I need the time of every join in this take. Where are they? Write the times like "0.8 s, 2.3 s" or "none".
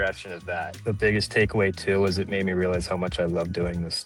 none